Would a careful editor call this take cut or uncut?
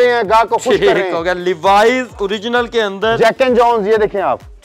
uncut